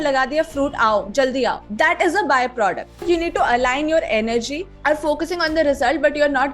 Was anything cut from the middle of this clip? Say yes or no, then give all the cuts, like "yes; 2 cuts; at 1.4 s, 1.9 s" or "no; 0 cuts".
yes; 3 cuts; at 1.6 s, 3.0 s, 4.6 s